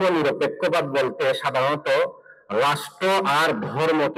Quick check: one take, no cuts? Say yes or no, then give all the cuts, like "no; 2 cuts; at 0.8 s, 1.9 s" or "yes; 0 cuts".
yes; 0 cuts